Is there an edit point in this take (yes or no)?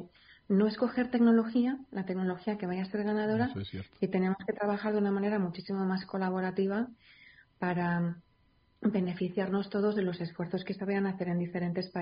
no